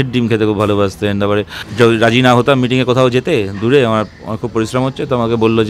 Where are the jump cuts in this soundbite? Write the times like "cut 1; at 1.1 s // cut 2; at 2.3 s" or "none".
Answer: cut 1; at 1.6 s